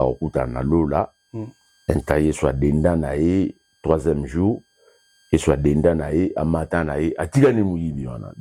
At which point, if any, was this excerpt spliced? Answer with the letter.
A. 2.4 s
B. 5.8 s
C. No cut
C